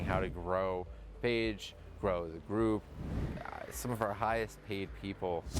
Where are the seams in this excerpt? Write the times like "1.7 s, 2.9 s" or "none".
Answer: 3.2 s